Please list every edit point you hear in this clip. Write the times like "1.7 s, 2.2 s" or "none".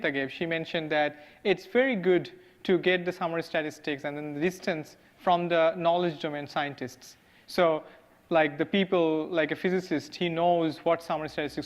3.9 s

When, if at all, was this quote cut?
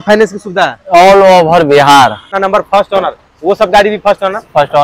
2.2 s

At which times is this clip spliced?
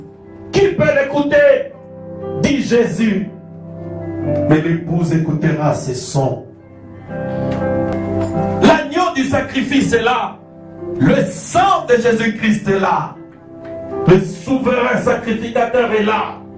7.9 s

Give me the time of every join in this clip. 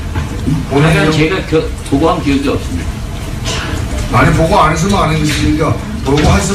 none

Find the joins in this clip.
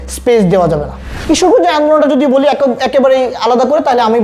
1.1 s

